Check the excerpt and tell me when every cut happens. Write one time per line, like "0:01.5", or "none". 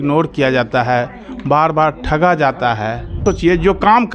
0:03.1